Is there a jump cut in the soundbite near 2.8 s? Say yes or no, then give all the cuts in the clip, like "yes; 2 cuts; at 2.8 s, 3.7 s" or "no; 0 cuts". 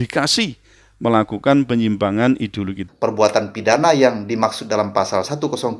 yes; 1 cut; at 2.8 s